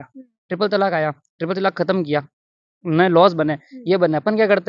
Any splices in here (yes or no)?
no